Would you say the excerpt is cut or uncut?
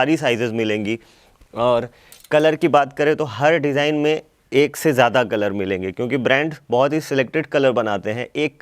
uncut